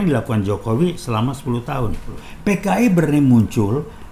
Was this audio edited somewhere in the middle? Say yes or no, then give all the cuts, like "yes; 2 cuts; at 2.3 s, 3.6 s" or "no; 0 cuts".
yes; 1 cut; at 2.3 s